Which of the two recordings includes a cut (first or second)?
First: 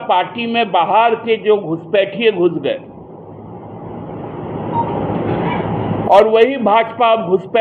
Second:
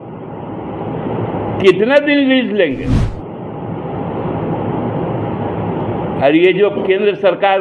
second